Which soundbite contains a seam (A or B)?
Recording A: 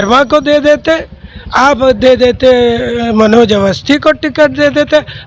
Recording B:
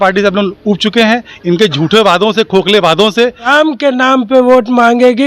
B